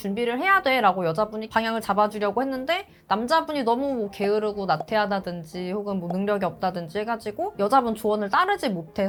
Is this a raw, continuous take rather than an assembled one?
yes; 0 cuts

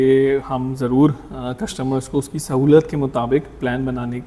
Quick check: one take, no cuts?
yes; 0 cuts

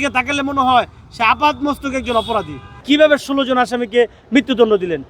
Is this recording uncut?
no; 1 cut; at 2.8 s

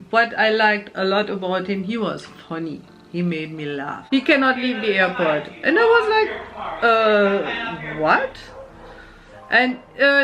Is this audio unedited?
no; 1 cut; at 3.9 s

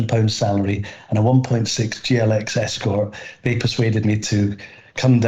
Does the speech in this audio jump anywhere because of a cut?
no; 0 cuts

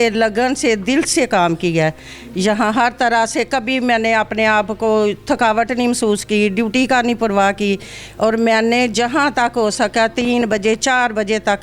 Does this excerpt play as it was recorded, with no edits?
yes; 0 cuts

